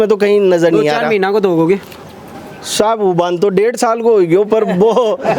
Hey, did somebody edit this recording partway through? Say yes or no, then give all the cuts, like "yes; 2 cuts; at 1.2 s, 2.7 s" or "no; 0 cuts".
no; 0 cuts